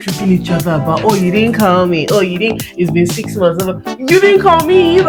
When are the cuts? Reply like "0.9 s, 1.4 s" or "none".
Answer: none